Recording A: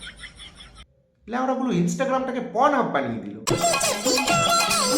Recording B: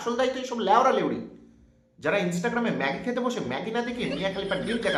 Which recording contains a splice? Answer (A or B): A